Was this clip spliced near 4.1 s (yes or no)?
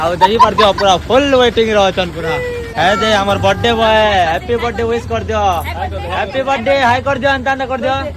no